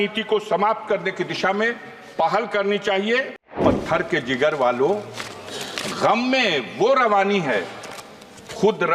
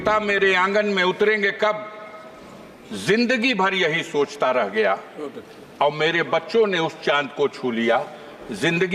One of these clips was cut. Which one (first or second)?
first